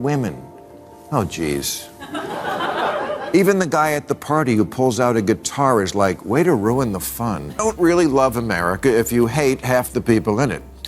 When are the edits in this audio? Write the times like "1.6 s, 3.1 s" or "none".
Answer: 7.6 s